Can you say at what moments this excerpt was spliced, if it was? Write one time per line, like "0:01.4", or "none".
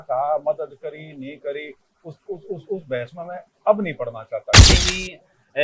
0:04.7